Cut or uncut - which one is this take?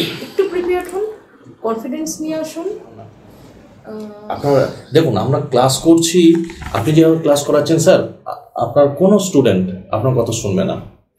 cut